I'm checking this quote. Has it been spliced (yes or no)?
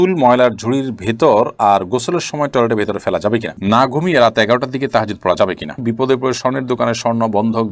yes